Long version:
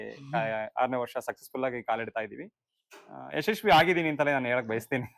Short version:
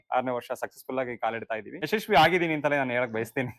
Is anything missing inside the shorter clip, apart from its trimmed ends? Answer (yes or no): yes